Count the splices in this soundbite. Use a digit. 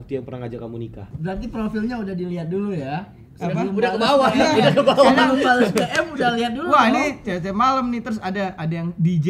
1